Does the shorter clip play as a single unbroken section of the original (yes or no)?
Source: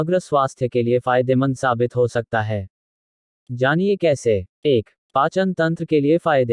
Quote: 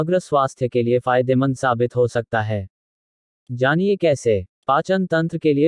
no